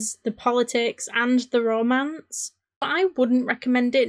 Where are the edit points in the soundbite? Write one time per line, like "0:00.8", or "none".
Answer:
0:02.9